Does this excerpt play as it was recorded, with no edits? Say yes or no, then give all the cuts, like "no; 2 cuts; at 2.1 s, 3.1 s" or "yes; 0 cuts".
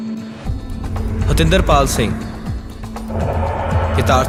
yes; 0 cuts